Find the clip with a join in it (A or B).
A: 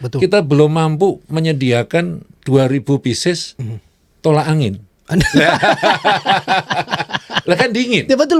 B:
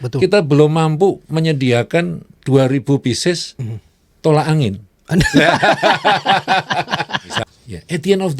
B